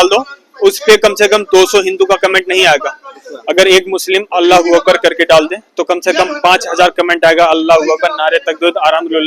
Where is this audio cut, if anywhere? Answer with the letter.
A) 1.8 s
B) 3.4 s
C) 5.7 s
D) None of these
D